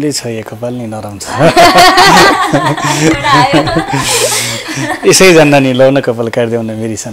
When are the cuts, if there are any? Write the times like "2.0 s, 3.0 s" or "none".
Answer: none